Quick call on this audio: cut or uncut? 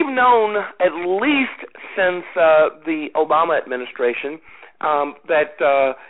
uncut